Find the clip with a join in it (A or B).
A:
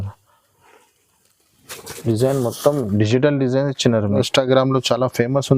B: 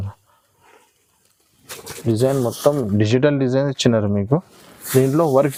A